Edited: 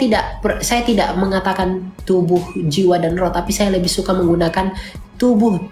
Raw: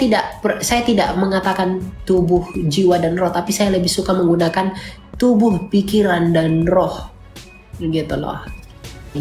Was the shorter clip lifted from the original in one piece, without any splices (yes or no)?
yes